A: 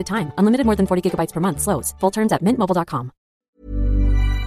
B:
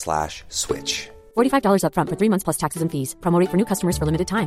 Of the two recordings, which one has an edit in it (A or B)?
A